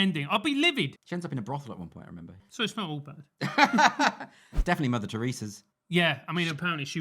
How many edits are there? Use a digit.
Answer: 3